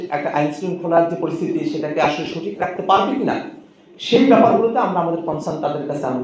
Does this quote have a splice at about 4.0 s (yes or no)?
no